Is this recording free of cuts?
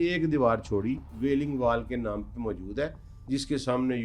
no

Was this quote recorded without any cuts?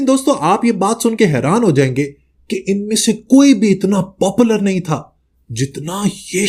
yes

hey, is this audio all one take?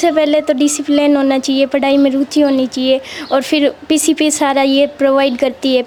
yes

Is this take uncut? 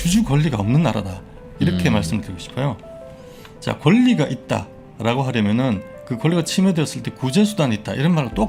yes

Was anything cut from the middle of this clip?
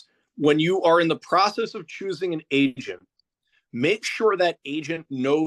no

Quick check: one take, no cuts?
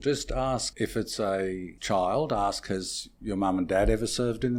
yes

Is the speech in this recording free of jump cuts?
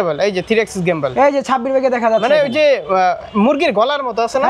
yes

